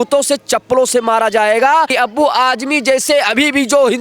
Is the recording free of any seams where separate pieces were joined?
no; 1 cut; at 1.9 s

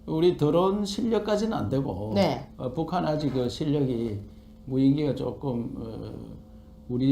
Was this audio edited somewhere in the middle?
yes; 1 cut; at 1.1 s

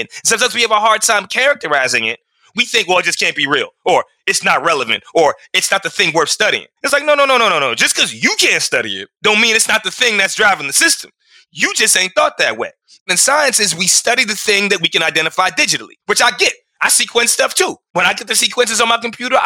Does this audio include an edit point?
no; 0 cuts

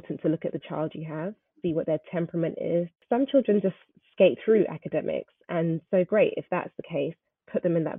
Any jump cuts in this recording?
yes; 1 cut; at 1.5 s

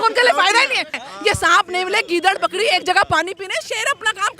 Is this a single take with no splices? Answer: no; 1 cut; at 1.0 s

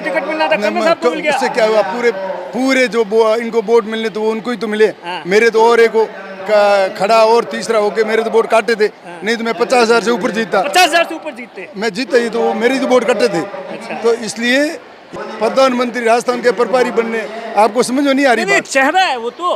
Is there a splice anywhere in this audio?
yes; 1 cut; at 15.1 s

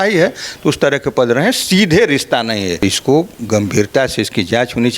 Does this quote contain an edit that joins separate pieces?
yes; 1 cut; at 2.7 s

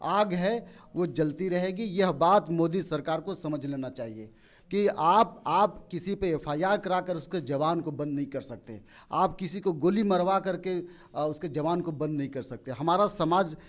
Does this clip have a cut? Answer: no; 0 cuts

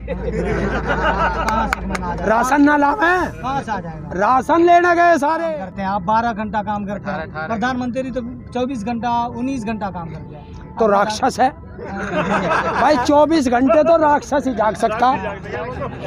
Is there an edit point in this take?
yes; 1 cut; at 5.5 s

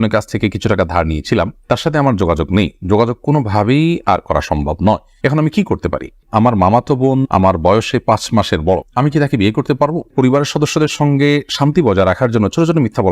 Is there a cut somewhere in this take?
yes; 2 cuts; at 6.2 s, 10.1 s

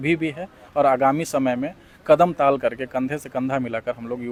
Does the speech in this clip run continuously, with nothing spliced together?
yes; 0 cuts

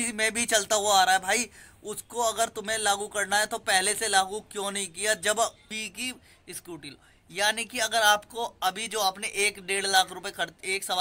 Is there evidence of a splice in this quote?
yes; 1 cut; at 5.7 s

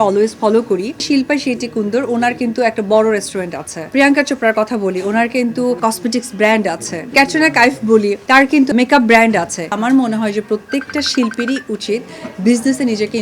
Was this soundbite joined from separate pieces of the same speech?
yes; 6 cuts; at 1.0 s, 3.9 s, 5.8 s, 7.1 s, 8.5 s, 9.8 s

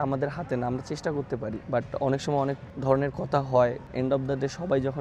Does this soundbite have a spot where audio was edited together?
yes; 3 cuts; at 1.6 s, 2.7 s, 3.9 s

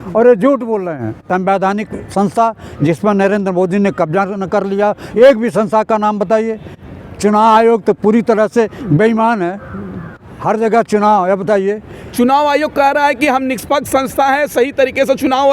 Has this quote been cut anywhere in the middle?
yes; 1 cut; at 1.2 s

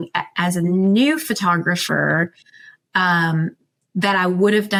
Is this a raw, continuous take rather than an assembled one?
yes; 0 cuts

